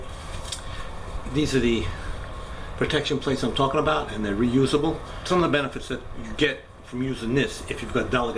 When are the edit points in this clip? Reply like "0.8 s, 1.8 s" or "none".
5.1 s